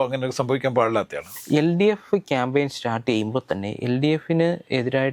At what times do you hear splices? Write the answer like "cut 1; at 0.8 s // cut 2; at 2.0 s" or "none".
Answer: cut 1; at 1.3 s

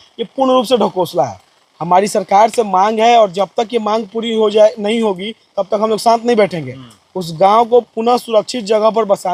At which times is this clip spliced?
none

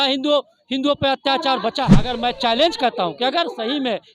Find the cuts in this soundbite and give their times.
cut 1; at 2.1 s

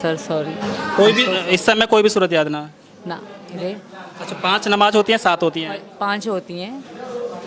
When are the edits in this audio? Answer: cut 1; at 3.4 s

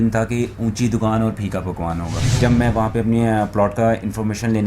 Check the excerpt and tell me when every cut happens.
cut 1; at 2.2 s

